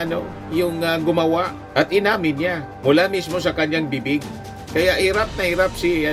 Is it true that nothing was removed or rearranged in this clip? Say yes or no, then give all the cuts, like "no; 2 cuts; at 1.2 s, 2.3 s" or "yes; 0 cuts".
yes; 0 cuts